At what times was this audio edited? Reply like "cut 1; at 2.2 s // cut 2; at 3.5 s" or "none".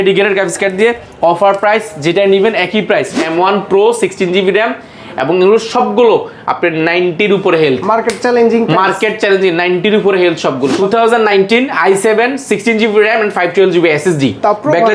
cut 1; at 3.2 s // cut 2; at 10.8 s